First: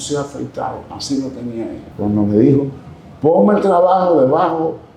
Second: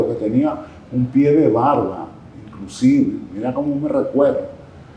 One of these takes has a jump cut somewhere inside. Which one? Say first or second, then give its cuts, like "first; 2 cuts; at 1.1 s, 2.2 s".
first; 1 cut; at 1.8 s